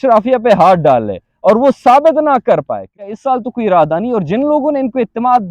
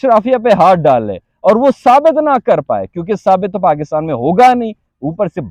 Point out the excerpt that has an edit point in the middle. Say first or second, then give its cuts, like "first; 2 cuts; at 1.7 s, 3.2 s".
first; 1 cut; at 3.1 s